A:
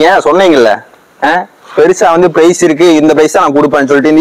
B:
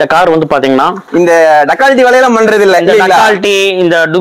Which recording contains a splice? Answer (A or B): B